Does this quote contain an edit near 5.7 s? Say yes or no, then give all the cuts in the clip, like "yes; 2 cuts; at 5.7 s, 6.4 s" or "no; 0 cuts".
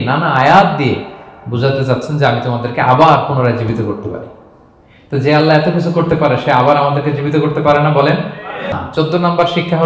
no; 1 cut; at 8.7 s